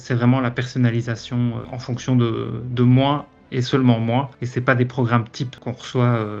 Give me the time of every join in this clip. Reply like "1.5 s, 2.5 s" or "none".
1.7 s, 5.5 s